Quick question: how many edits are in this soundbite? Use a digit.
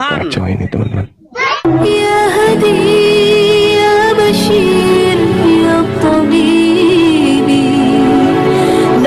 1